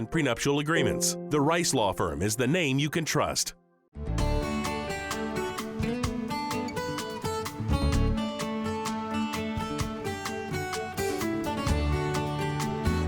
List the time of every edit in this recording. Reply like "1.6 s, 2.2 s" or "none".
4.1 s